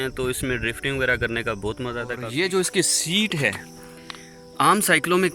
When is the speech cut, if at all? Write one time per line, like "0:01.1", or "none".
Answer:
0:02.2